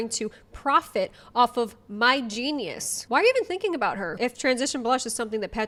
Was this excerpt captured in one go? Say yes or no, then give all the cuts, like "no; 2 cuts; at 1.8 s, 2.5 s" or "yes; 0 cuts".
yes; 0 cuts